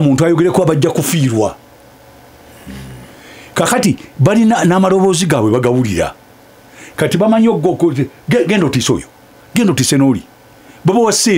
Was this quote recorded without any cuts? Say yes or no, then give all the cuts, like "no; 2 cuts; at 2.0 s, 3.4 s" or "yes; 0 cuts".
yes; 0 cuts